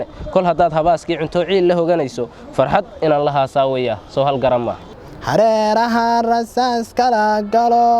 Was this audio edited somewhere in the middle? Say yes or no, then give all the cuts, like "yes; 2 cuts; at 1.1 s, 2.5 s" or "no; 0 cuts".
yes; 1 cut; at 5.1 s